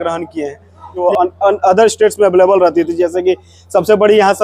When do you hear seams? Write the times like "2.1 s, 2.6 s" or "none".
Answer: 1.0 s